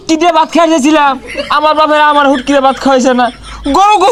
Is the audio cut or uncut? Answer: uncut